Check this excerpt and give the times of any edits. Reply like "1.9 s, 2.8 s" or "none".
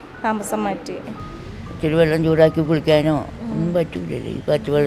1.2 s